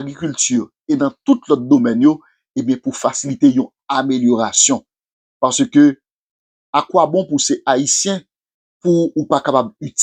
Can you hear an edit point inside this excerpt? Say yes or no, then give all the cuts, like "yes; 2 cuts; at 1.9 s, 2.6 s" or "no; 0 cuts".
no; 0 cuts